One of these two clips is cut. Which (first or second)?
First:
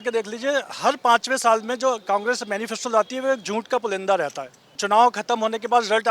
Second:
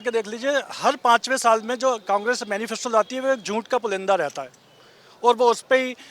first